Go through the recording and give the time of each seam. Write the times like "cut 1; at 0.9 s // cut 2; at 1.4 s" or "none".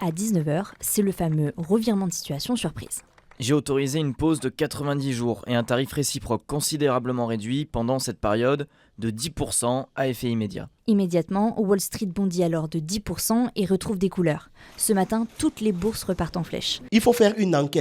cut 1; at 10.7 s // cut 2; at 16.7 s